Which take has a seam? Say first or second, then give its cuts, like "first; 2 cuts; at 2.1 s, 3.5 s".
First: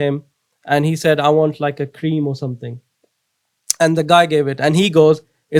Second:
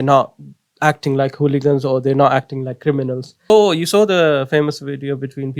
second; 1 cut; at 3.5 s